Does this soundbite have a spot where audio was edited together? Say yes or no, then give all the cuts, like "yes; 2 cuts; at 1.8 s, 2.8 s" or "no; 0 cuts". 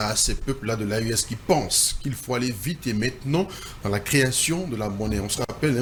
no; 0 cuts